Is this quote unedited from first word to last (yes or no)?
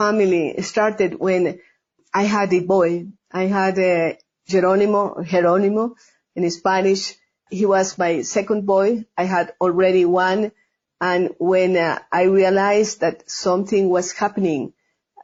yes